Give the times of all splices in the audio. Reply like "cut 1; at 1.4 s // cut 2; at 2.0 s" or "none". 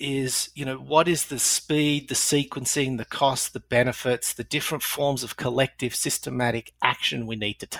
none